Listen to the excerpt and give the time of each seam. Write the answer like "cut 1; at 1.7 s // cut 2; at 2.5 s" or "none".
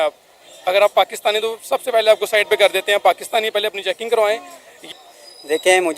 cut 1; at 4.9 s